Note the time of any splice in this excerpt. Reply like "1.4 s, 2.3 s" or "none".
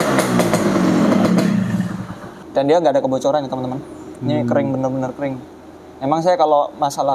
2.4 s